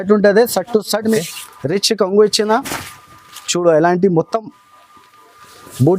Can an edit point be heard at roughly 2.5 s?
no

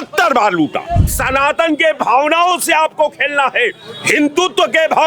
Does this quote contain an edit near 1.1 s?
yes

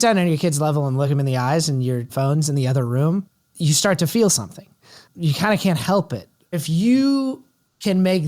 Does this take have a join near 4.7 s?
no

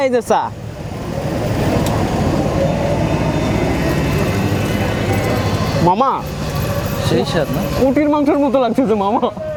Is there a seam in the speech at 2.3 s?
no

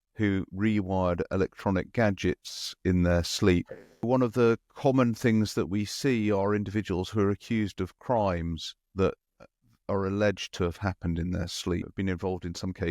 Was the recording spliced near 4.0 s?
yes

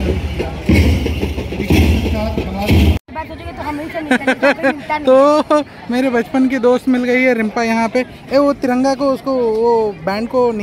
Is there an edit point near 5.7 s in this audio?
no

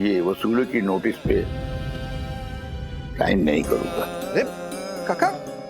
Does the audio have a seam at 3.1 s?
yes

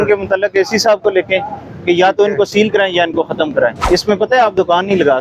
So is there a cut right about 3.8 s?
yes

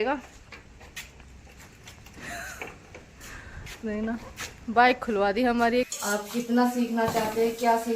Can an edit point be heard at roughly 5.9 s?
yes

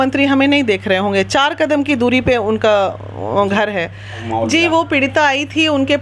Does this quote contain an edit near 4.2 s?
yes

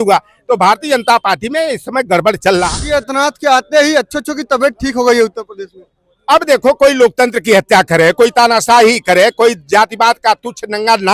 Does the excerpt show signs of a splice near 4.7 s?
no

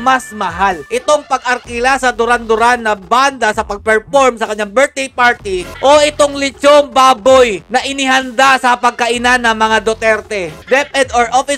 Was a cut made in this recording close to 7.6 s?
no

